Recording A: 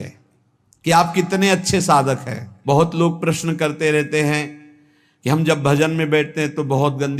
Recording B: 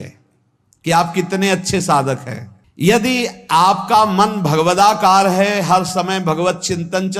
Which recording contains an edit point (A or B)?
A